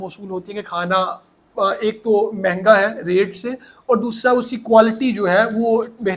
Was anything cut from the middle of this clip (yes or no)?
no